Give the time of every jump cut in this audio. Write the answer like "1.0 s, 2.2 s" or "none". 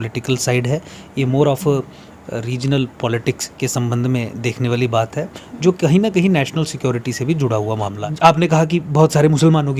8.0 s